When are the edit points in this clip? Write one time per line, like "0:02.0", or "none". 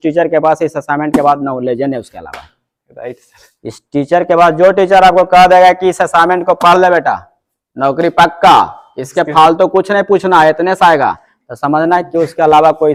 none